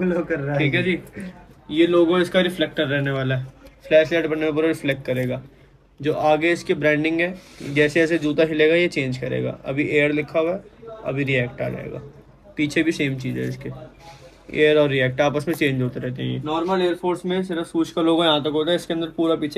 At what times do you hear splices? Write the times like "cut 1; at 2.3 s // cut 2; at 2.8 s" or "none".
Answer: cut 1; at 16.4 s